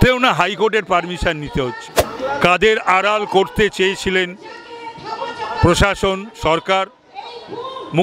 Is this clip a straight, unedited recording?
no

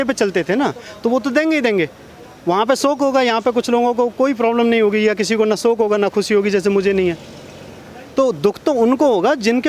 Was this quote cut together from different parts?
no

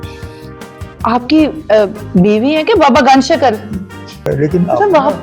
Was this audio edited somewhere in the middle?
yes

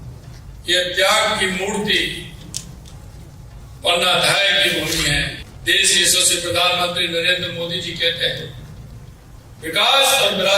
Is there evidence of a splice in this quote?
yes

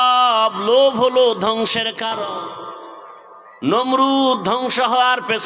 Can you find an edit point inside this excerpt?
yes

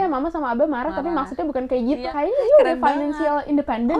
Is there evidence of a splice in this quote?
yes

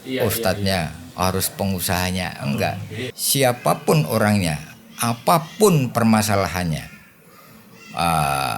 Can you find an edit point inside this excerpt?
yes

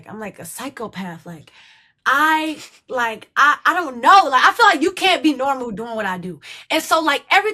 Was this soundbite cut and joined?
no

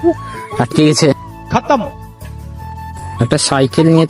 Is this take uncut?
yes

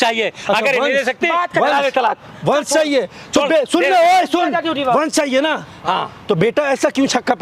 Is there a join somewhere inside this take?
no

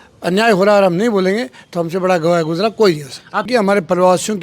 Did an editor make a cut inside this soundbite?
yes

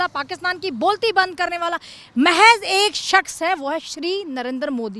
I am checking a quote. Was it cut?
no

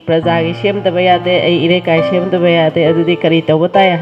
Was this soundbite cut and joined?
no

